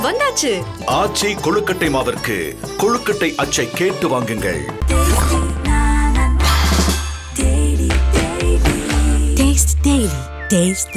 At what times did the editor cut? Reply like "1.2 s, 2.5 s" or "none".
4.8 s